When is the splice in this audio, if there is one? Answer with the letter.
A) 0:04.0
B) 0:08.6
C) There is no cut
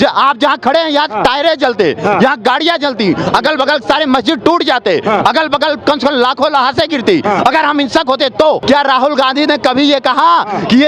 B